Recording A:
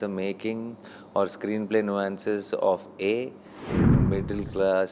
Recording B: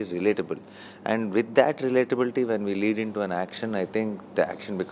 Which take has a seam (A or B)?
A